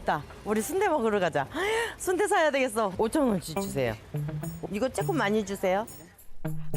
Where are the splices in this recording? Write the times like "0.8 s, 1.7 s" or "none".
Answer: 2.9 s